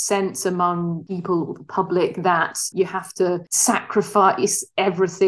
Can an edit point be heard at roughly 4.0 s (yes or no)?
no